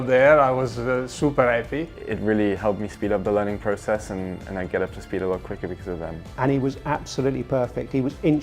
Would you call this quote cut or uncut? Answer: cut